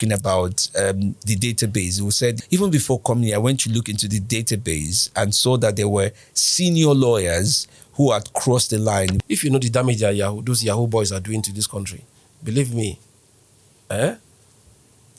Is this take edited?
yes; 2 cuts; at 2.4 s, 9.2 s

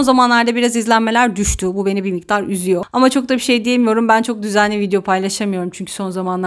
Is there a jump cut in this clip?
no; 0 cuts

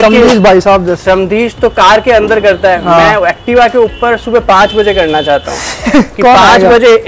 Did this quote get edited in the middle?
no; 0 cuts

